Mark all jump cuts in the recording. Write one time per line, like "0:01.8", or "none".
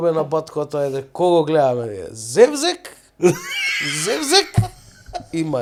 none